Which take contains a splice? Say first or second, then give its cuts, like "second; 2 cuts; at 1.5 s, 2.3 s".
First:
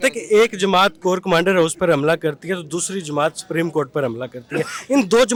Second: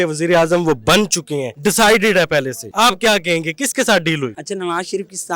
second; 3 cuts; at 1.5 s, 2.6 s, 4.4 s